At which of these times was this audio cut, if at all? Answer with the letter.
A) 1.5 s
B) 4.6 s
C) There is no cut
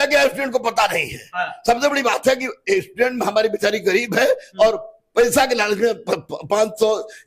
C